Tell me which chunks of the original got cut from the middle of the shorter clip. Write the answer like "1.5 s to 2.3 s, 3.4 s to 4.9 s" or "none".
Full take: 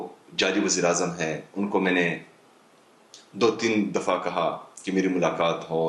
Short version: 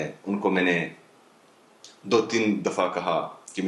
none